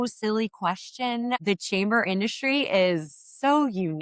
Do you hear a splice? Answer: yes; 1 cut; at 1.4 s

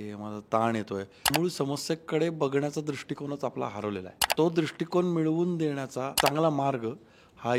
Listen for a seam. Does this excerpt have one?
yes; 3 cuts; at 1.3 s, 4.3 s, 6.1 s

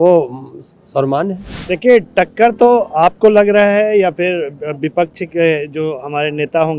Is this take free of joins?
no; 1 cut; at 1.5 s

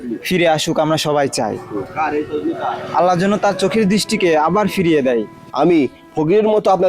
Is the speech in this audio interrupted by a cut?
yes; 1 cut; at 5.4 s

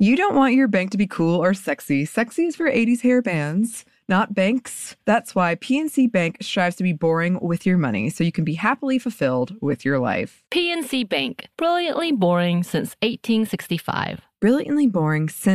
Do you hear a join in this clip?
no; 0 cuts

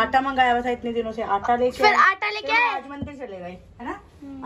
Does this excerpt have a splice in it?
no; 0 cuts

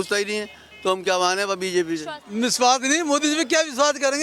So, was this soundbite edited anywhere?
yes; 1 cut; at 2.2 s

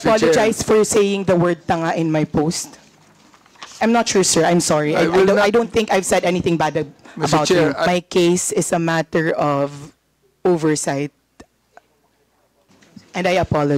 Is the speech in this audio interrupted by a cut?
yes; 2 cuts; at 3.8 s, 7.9 s

